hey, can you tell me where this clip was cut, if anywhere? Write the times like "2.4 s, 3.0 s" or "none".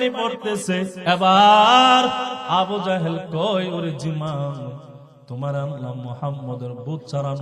0.9 s